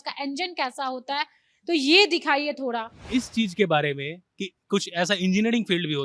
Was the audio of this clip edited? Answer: yes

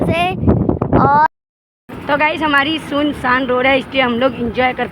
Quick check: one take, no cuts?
no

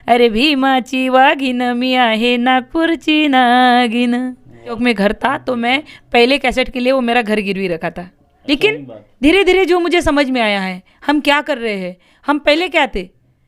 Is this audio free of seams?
no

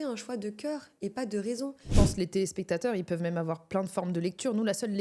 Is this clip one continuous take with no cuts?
no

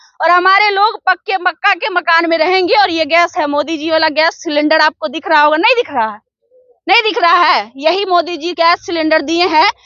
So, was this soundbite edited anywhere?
no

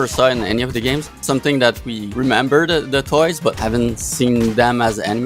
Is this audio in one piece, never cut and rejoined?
no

